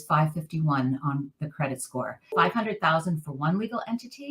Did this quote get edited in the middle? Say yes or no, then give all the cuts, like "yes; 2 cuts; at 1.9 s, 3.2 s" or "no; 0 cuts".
yes; 1 cut; at 2.3 s